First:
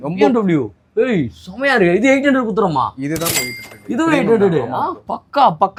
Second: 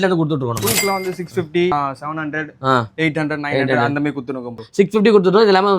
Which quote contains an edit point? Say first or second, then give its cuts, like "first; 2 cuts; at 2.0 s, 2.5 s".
second; 2 cuts; at 1.7 s, 4.5 s